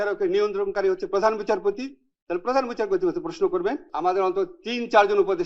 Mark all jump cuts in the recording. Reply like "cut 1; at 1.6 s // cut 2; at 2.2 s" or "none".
cut 1; at 3.9 s